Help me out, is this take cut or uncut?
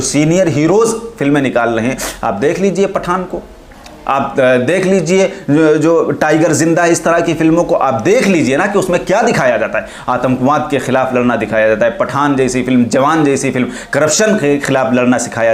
uncut